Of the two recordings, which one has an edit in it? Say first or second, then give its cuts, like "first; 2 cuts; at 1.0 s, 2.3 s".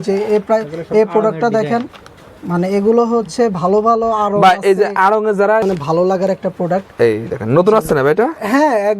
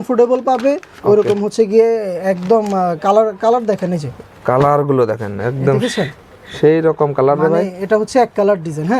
first; 1 cut; at 5.6 s